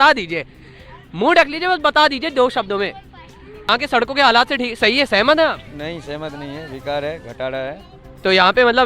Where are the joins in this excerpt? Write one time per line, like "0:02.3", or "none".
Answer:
0:03.6